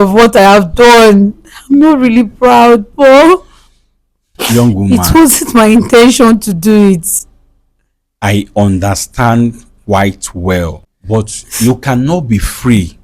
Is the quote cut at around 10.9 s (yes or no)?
yes